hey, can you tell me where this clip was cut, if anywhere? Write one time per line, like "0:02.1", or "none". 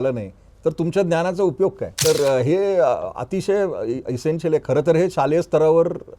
0:01.9